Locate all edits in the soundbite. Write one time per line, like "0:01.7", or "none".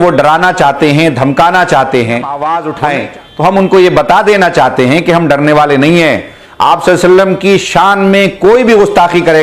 0:02.4